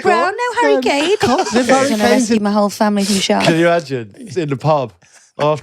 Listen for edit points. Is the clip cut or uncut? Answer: cut